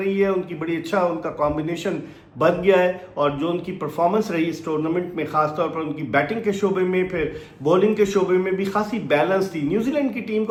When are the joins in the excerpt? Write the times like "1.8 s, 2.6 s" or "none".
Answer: none